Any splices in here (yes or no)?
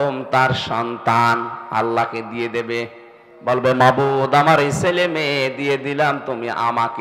no